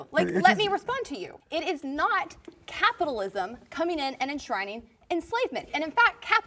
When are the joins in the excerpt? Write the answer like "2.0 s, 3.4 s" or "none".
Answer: 1.3 s, 5.7 s